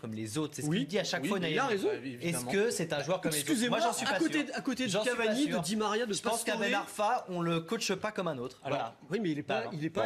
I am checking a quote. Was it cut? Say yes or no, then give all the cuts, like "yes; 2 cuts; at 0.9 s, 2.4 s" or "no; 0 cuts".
no; 0 cuts